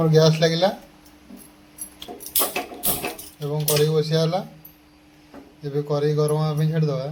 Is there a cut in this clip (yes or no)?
no